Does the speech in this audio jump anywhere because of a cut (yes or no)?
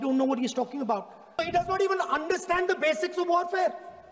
yes